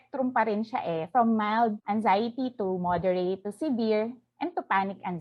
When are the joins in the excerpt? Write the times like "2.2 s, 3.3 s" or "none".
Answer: none